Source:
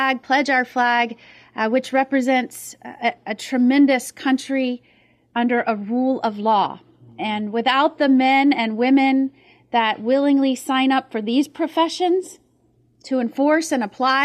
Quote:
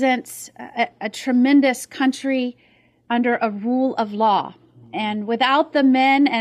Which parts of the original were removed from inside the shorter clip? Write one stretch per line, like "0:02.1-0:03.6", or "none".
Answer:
none